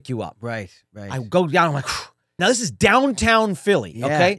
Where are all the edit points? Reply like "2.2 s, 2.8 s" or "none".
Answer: 2.4 s